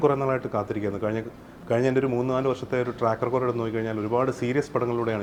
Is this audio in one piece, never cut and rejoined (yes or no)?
yes